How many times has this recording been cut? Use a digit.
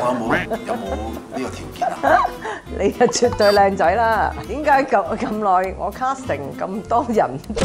1